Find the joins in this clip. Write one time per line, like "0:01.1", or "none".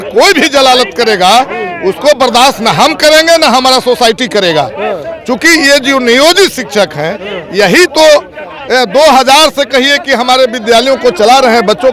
none

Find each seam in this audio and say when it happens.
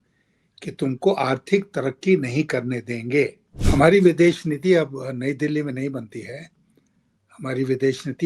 0:03.5

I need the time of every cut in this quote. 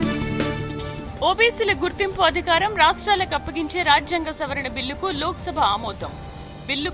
0:01.1

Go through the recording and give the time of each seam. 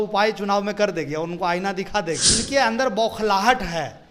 0:02.4

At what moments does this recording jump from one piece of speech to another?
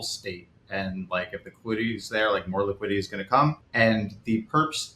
0:03.6

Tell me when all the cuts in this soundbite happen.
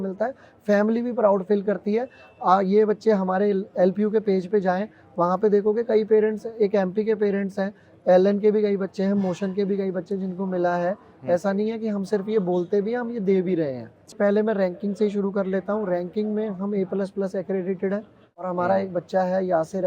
0:14.1
0:18.5

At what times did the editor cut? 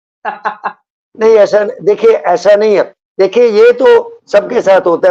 none

